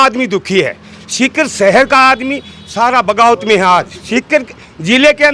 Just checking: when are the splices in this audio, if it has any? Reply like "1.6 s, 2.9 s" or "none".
none